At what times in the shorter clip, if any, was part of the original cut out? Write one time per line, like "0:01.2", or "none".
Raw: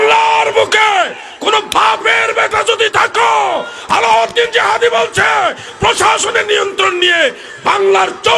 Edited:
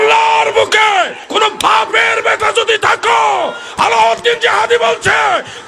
0:01.2